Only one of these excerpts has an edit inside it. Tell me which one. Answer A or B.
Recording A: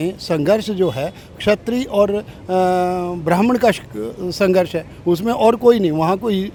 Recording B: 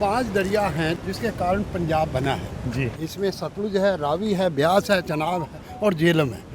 B